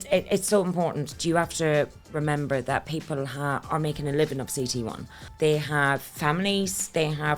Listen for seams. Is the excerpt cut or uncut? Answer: cut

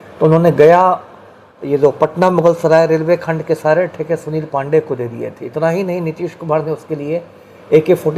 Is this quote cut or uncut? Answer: uncut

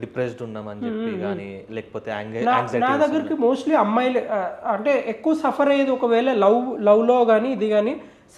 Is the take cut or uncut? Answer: uncut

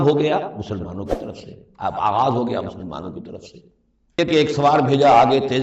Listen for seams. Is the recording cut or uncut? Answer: cut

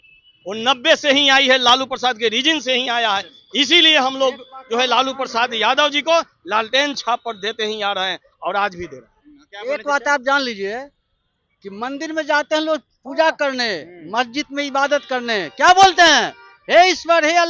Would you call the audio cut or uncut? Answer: uncut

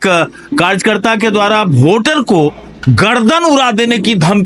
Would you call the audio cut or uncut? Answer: uncut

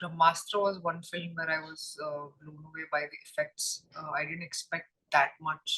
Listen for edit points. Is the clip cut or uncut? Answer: uncut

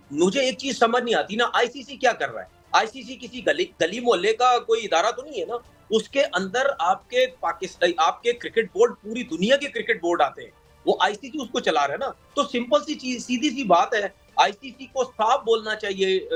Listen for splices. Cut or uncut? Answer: uncut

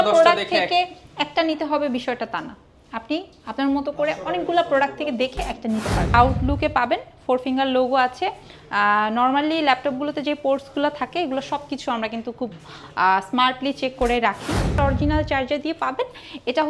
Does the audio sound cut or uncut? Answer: cut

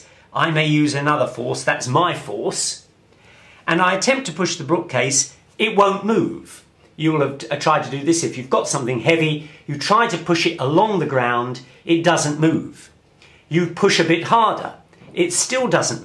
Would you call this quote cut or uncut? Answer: cut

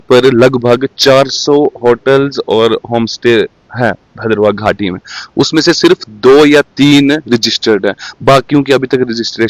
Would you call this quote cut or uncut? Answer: uncut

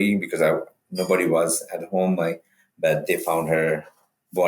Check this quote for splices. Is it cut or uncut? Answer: cut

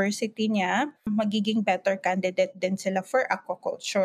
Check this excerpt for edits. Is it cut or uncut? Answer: cut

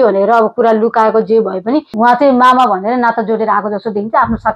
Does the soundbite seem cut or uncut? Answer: cut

